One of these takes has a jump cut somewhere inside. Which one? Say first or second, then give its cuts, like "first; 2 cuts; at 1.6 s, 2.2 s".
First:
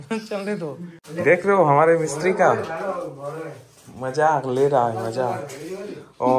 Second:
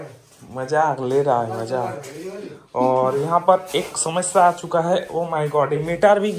first; 1 cut; at 0.9 s